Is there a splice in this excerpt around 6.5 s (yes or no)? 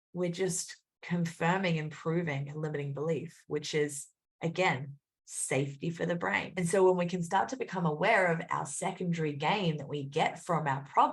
yes